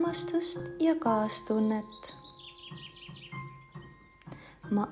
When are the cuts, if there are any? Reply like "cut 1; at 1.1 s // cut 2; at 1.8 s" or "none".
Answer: none